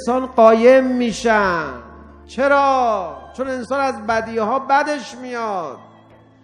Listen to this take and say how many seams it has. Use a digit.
1